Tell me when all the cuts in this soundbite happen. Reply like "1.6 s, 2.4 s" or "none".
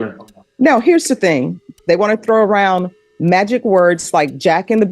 1.7 s